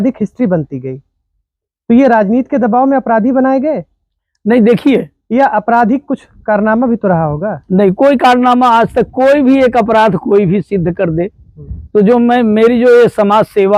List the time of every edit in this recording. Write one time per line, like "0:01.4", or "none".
none